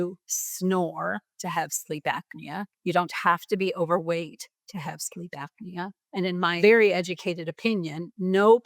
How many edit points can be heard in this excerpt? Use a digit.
2